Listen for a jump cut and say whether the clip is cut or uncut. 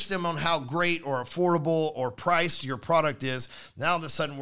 uncut